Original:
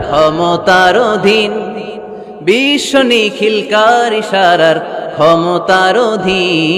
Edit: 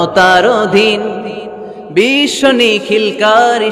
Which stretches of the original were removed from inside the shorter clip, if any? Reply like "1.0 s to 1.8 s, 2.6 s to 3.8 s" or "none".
none